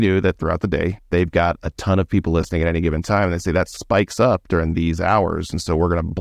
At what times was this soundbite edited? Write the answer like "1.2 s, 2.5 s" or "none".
1.0 s